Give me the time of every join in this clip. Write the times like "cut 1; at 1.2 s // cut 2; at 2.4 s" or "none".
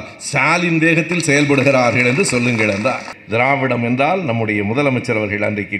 cut 1; at 3.1 s